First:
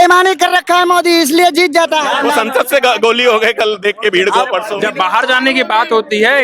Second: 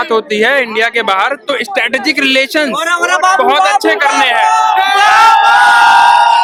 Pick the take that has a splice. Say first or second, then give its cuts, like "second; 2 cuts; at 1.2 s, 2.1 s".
first; 2 cuts; at 2.1 s, 4.7 s